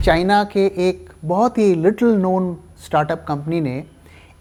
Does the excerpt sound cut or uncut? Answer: uncut